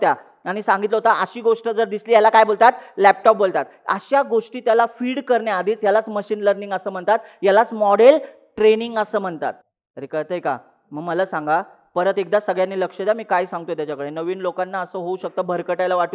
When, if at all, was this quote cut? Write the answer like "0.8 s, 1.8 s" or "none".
none